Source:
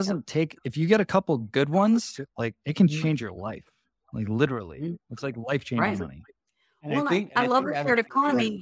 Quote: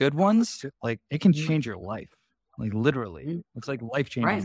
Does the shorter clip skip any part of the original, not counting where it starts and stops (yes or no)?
no